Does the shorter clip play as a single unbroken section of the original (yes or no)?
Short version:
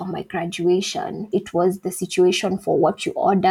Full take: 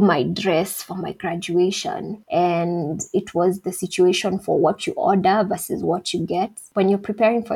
no